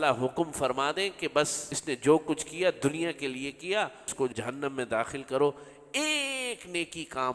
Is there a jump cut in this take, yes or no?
yes